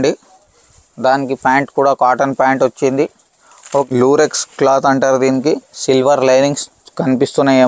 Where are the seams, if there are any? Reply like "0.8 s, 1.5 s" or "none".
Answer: 3.9 s